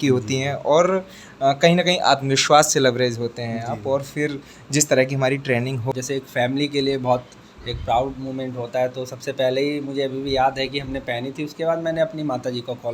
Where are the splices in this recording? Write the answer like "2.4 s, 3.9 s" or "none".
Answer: 5.9 s